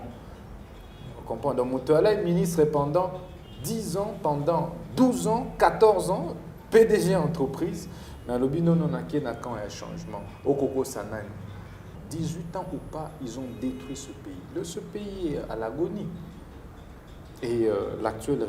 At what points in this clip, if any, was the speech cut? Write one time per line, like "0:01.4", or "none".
0:12.0